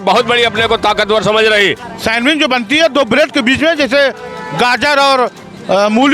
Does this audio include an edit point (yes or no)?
yes